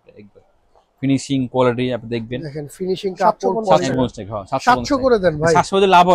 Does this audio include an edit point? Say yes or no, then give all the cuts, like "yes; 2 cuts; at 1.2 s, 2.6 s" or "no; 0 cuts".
yes; 1 cut; at 3.7 s